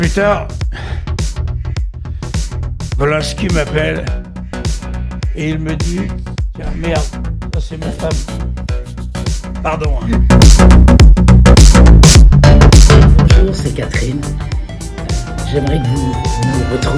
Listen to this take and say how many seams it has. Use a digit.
1